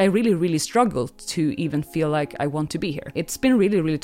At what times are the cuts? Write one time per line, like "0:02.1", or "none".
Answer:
0:03.0

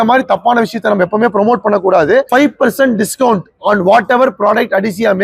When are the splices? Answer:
0:02.3

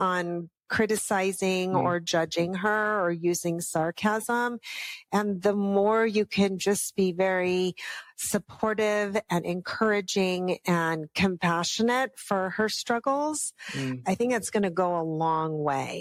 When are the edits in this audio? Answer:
none

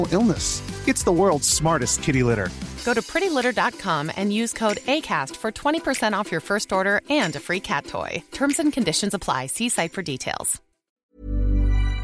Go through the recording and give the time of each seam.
0:11.0

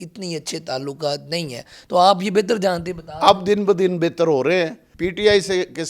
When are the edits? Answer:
0:04.9

